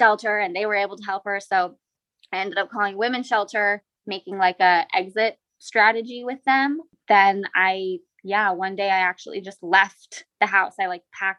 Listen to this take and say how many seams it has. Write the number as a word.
one